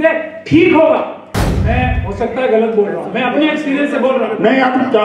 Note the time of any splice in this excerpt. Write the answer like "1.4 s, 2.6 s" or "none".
1.5 s